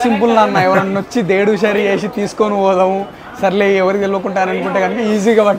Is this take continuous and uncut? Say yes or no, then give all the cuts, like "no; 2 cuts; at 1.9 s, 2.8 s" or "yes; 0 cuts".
yes; 0 cuts